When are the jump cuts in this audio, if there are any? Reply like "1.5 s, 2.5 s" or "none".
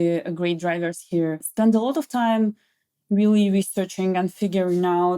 1.5 s